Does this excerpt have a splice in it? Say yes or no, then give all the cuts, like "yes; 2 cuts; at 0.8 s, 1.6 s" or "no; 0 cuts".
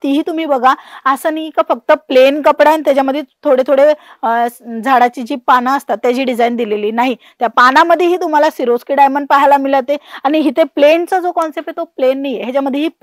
no; 0 cuts